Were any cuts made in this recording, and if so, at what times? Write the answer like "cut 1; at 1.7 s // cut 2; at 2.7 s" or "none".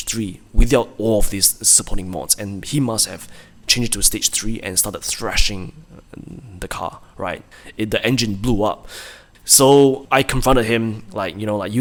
none